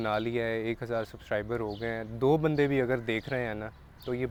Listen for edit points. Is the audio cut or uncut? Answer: uncut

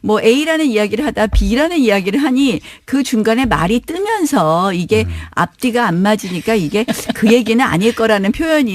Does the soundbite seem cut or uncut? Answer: cut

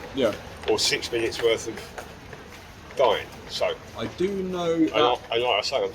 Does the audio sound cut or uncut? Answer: uncut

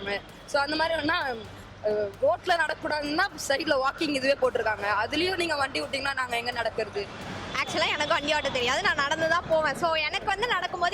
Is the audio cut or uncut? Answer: cut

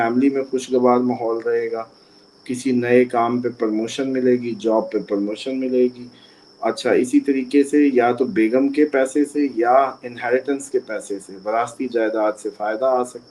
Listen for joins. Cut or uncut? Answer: uncut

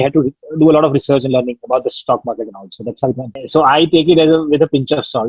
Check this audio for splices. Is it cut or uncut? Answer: cut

